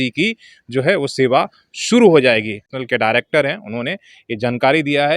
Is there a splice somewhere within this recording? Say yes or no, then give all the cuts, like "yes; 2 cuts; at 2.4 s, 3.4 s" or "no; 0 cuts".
yes; 1 cut; at 2.8 s